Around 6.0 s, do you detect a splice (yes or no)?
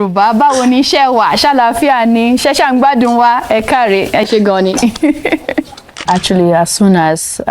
yes